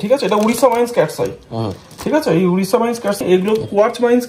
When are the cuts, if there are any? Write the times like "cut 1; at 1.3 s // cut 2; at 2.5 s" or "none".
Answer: cut 1; at 3.2 s